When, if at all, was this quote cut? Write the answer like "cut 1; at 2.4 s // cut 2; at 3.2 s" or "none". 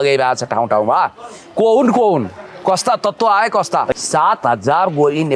cut 1; at 3.9 s